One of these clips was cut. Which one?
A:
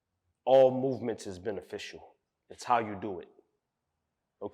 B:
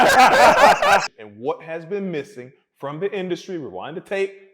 B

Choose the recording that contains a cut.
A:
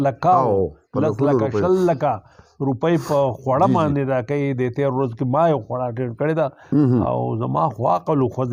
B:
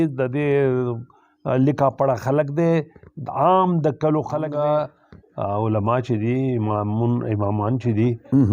B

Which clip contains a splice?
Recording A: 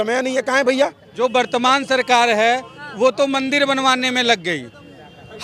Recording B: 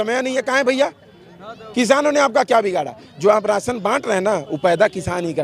A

